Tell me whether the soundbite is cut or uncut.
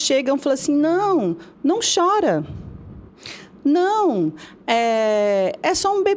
uncut